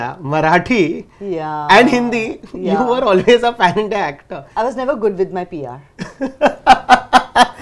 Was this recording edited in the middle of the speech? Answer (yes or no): no